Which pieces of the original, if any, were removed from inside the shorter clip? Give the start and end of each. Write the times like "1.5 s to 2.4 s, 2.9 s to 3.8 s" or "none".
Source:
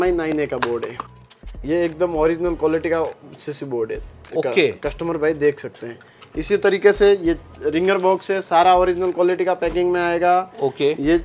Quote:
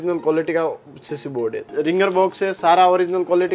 4.0 s to 7.5 s